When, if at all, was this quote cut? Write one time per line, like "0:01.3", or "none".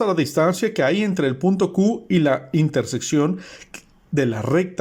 none